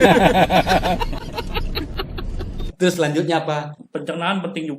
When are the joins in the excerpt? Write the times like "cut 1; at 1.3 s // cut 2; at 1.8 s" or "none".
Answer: cut 1; at 2.6 s // cut 2; at 3.8 s